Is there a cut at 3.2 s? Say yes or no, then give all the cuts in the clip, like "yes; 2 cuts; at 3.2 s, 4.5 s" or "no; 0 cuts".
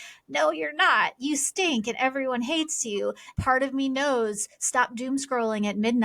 yes; 1 cut; at 3.2 s